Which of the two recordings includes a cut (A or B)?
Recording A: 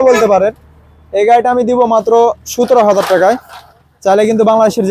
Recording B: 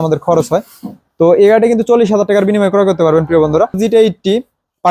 B